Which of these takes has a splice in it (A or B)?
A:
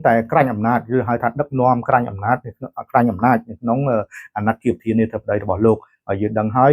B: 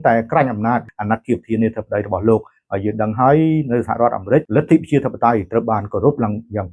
B